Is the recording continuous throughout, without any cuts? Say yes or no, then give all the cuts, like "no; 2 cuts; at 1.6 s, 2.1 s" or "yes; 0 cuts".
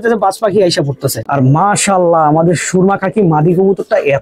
no; 1 cut; at 1.2 s